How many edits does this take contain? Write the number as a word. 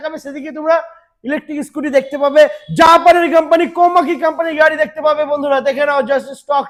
zero